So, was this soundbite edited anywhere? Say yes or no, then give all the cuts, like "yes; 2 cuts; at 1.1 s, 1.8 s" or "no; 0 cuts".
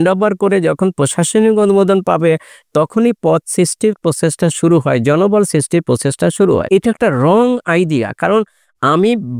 yes; 1 cut; at 6.6 s